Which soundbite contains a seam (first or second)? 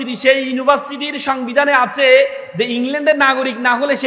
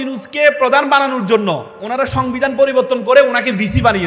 second